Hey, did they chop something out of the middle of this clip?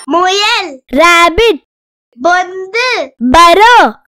no; 0 cuts

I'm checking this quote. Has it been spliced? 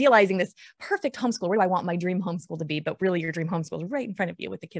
no; 0 cuts

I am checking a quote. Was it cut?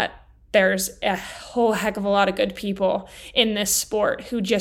no; 0 cuts

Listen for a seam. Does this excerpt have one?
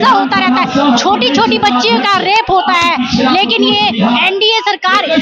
no; 0 cuts

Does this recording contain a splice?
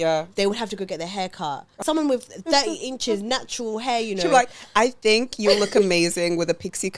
yes; 1 cut; at 1.8 s

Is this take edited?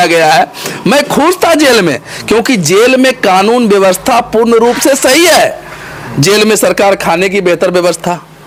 no; 0 cuts

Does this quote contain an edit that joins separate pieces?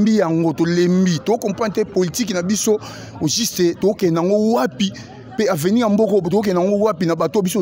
no; 0 cuts

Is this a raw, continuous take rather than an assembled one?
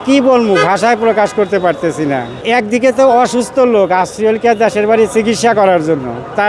no; 1 cut; at 2.4 s

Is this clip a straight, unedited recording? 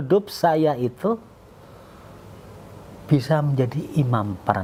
yes; 0 cuts

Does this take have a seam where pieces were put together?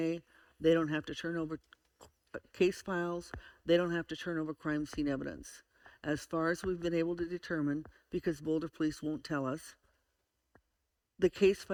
no; 0 cuts

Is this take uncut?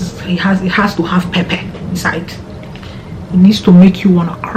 yes; 0 cuts

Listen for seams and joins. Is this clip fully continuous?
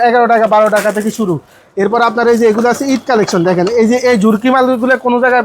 yes; 0 cuts

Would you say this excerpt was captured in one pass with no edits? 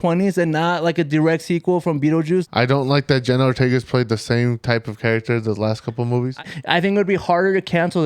no; 2 cuts; at 2.5 s, 6.4 s

